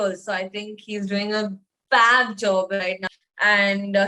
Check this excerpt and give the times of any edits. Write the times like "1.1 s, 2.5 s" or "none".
3.1 s